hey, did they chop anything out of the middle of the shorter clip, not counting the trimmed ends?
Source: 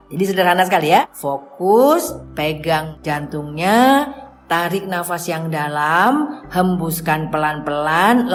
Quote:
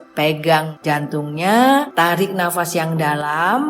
yes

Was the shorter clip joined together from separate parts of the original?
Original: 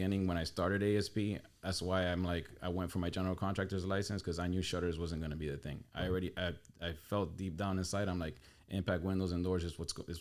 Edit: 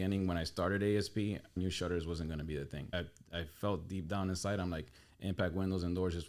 yes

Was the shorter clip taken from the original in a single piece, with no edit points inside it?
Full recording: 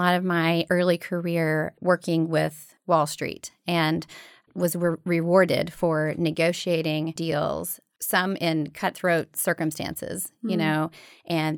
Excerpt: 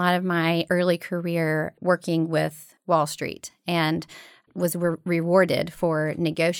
yes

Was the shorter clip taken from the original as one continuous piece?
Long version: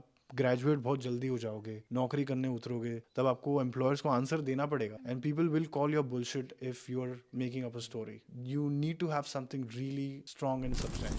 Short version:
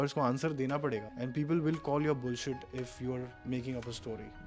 yes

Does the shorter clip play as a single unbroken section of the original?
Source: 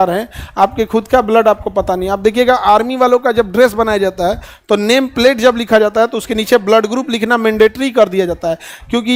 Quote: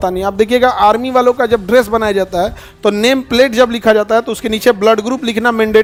yes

